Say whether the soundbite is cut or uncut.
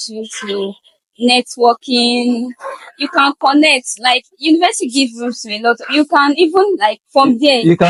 uncut